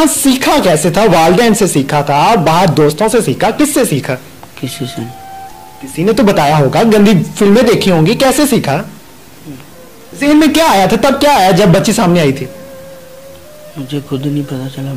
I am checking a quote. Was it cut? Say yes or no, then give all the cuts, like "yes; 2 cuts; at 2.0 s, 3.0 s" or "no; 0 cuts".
no; 0 cuts